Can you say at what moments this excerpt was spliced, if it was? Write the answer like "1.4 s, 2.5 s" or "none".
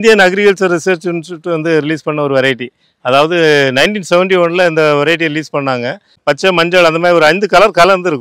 6.2 s